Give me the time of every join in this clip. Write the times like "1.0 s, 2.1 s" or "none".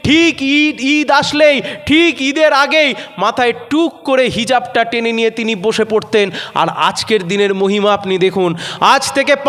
none